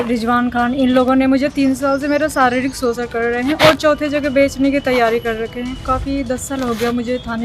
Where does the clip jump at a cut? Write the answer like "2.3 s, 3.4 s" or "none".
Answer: 5.9 s